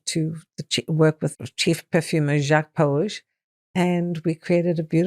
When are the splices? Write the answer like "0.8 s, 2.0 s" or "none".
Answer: 1.5 s